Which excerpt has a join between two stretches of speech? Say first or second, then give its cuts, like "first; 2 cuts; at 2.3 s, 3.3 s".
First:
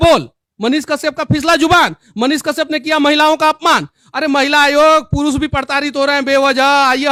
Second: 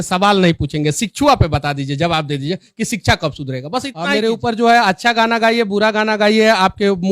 second; 1 cut; at 4.0 s